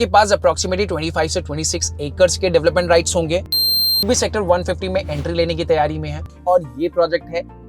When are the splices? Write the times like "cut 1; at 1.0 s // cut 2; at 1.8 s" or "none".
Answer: cut 1; at 3.5 s // cut 2; at 6.2 s